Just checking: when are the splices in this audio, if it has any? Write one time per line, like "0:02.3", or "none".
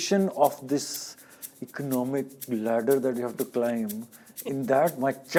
none